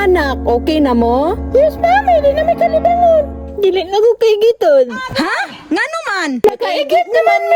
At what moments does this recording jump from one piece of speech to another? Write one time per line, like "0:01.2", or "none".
none